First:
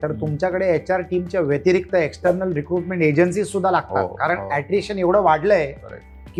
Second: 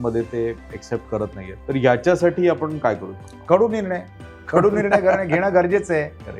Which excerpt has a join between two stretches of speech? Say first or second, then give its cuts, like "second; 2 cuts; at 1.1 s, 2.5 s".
second; 1 cut; at 1.5 s